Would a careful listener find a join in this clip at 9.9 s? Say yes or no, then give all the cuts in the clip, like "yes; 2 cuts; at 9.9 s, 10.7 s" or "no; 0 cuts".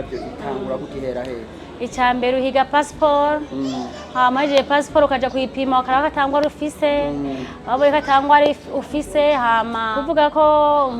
yes; 1 cut; at 9.9 s